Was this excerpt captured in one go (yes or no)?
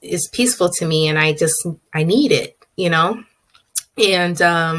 yes